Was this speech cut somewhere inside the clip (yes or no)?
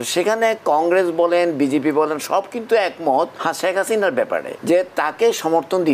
yes